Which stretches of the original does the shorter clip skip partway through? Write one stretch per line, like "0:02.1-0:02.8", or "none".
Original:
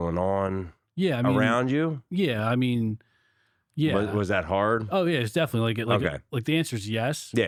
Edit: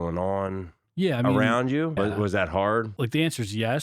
0:01.9-0:03.9
0:04.9-0:06.2